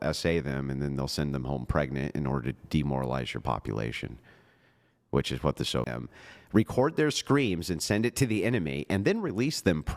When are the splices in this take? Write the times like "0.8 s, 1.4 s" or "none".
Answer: 5.9 s